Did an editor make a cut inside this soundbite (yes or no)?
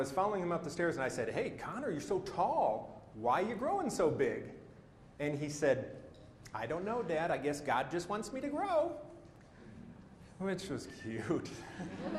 no